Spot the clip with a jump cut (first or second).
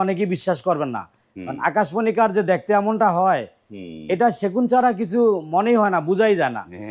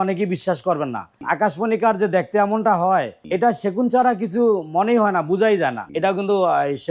second